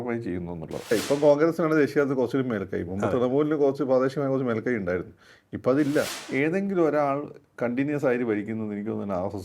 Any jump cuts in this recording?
yes; 2 cuts; at 0.9 s, 6.2 s

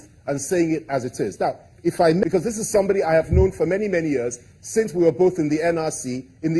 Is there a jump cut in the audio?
yes; 1 cut; at 2.2 s

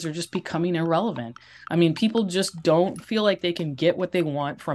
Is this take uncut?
no; 1 cut; at 3.0 s

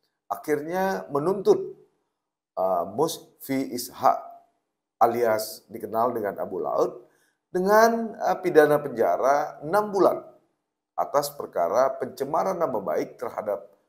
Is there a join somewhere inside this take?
no; 0 cuts

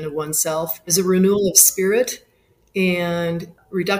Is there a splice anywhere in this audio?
yes; 1 cut; at 0.9 s

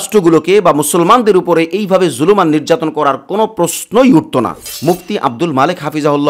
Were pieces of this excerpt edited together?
yes; 1 cut; at 4.7 s

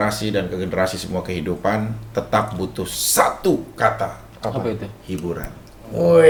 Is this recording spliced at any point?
no; 0 cuts

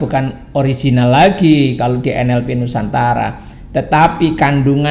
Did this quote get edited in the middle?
no; 0 cuts

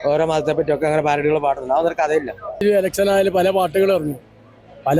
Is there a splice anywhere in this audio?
yes; 1 cut; at 2.6 s

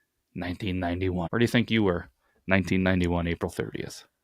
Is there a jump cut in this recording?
yes; 1 cut; at 1.3 s

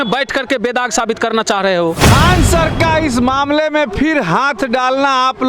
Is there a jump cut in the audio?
yes; 1 cut; at 2.0 s

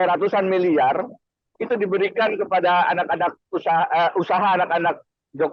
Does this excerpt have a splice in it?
no; 0 cuts

